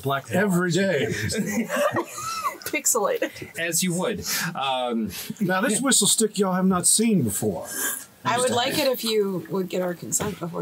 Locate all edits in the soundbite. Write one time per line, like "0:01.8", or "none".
0:08.3

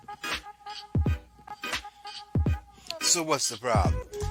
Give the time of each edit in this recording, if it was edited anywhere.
none

